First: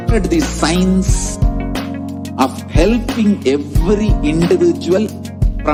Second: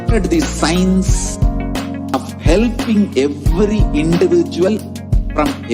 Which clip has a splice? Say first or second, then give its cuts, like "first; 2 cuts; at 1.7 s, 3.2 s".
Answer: second; 1 cut; at 2.1 s